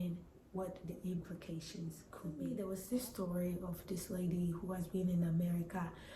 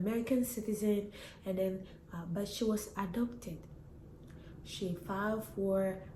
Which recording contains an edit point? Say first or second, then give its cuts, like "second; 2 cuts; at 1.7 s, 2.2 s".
first; 1 cut; at 2.4 s